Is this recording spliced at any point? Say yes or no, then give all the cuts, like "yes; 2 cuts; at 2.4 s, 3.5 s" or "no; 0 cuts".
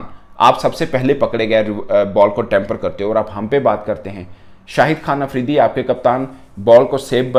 no; 0 cuts